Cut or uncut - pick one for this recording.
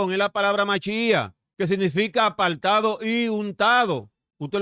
cut